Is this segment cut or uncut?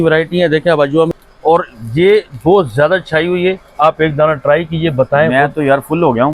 cut